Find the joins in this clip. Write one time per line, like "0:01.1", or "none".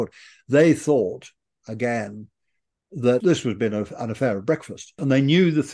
0:03.2
0:05.0